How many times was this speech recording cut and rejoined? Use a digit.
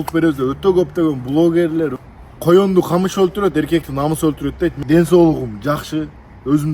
2